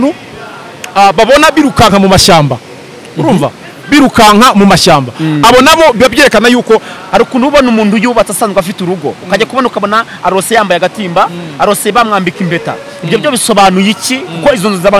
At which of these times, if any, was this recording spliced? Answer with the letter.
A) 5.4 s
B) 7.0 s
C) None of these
B